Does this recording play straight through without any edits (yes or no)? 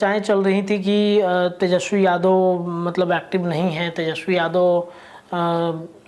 yes